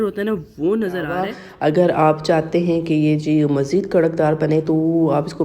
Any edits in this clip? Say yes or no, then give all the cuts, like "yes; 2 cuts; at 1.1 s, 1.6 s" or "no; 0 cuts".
yes; 1 cut; at 1.4 s